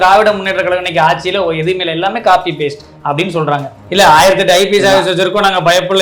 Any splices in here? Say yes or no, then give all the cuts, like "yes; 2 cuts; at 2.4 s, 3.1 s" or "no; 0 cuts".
yes; 1 cut; at 3.8 s